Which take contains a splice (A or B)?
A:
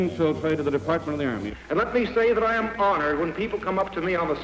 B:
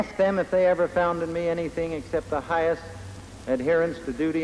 A